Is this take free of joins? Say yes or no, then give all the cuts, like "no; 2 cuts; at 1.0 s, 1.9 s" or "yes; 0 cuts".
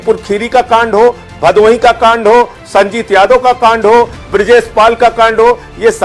yes; 0 cuts